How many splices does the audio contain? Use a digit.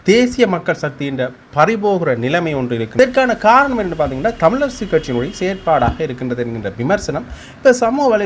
1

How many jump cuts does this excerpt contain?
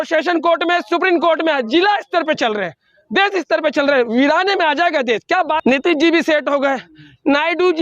1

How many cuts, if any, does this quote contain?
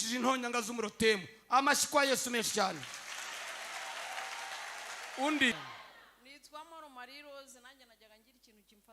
1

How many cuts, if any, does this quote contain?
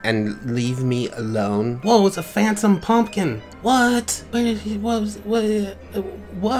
3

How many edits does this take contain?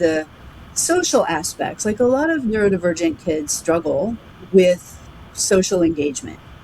1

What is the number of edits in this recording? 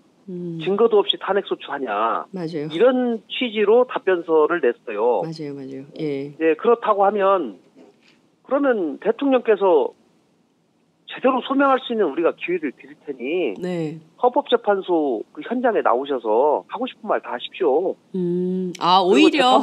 1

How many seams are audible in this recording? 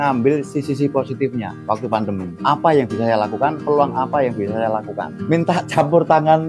1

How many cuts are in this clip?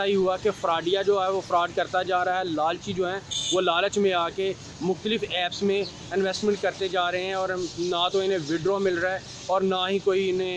0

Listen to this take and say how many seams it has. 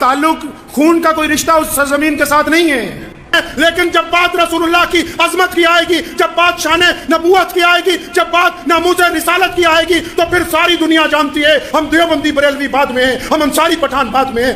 1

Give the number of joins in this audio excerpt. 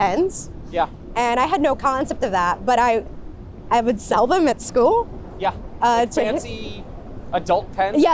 0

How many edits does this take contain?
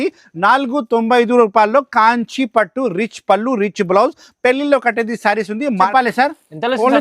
1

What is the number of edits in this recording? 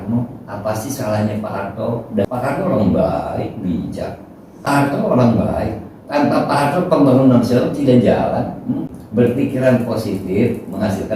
3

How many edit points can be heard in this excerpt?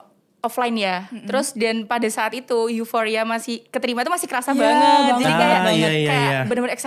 0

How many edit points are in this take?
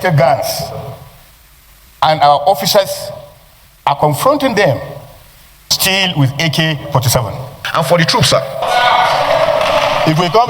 1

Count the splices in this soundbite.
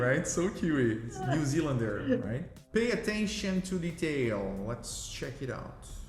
2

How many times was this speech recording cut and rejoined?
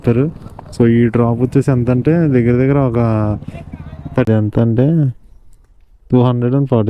1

